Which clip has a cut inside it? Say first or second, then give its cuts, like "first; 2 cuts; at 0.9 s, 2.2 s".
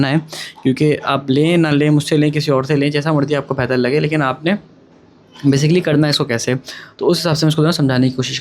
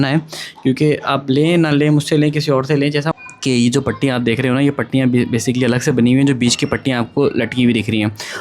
second; 1 cut; at 3.1 s